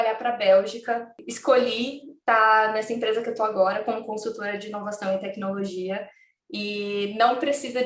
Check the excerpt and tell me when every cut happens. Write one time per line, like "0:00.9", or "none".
0:01.3